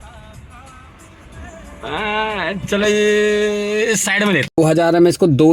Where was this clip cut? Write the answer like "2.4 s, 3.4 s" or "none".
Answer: 4.6 s